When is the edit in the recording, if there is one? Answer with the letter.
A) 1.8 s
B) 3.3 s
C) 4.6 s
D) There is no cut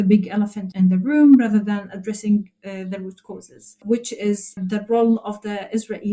C